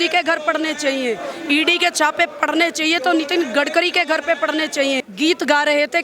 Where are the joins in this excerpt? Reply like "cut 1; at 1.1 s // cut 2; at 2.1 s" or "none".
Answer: cut 1; at 5.0 s